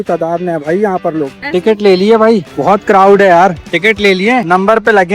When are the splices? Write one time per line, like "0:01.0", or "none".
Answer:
0:01.4
0:03.7